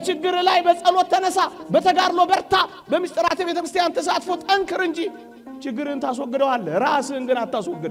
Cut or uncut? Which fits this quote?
uncut